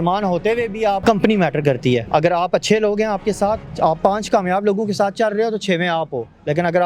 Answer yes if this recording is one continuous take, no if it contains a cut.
no